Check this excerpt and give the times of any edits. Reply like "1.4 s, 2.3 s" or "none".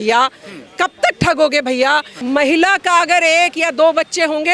2.1 s